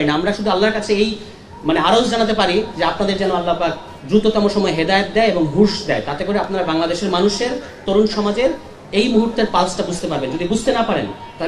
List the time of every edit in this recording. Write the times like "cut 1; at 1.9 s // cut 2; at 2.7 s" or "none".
none